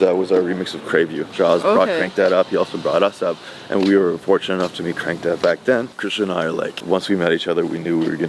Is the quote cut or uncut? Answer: cut